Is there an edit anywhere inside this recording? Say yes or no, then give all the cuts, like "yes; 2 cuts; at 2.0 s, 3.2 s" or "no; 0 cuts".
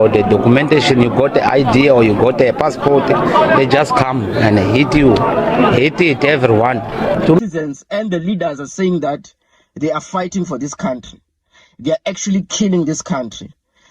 yes; 1 cut; at 7.4 s